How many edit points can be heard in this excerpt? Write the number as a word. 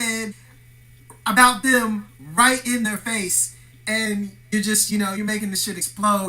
one